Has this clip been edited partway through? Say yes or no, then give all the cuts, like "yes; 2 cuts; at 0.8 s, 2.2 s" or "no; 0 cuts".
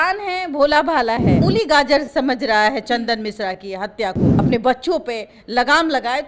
yes; 2 cuts; at 1.3 s, 4.2 s